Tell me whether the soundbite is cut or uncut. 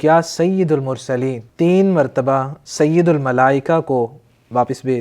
cut